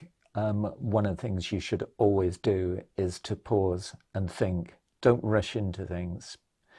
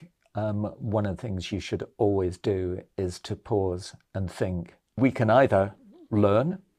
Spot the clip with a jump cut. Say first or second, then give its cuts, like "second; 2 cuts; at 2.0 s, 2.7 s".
second; 1 cut; at 4.9 s